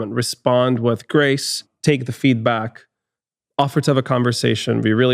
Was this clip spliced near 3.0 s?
no; 1 cut; at 1.7 s

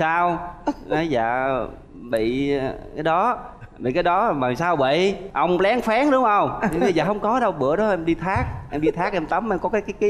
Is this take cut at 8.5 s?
no; 0 cuts

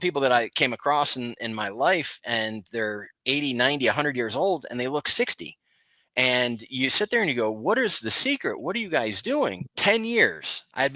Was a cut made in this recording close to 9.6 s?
yes; 1 cut; at 9.6 s

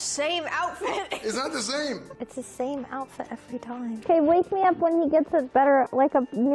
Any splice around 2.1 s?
yes; 2 cuts; at 2.1 s, 4.0 s

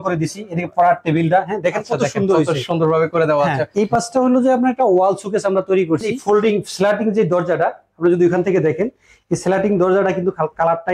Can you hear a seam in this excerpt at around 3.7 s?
yes; 2 cuts; at 3.7 s, 6.1 s

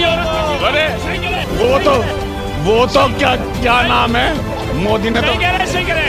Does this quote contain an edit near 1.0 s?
no; 0 cuts

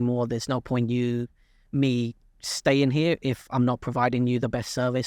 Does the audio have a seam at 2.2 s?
no; 0 cuts

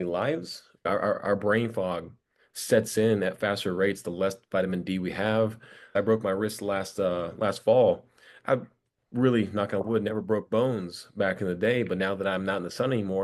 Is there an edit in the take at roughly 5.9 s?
yes; 2 cuts; at 0.9 s, 5.9 s

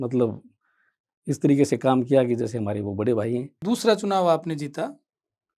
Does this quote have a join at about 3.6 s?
yes; 1 cut; at 3.6 s

